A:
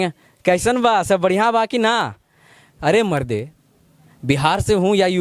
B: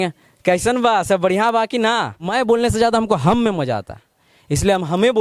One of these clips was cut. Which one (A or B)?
B